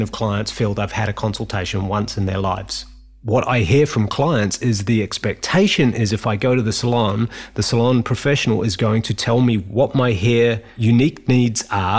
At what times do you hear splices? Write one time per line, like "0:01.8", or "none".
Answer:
0:02.8
0:09.6
0:10.7